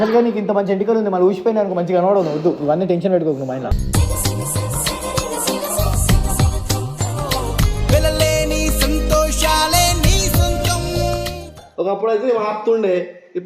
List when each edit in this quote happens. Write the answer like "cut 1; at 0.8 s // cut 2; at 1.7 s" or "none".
cut 1; at 11.5 s